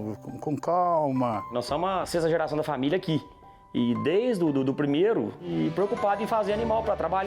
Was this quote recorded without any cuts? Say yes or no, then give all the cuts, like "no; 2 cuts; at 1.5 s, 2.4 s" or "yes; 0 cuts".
no; 1 cut; at 5.5 s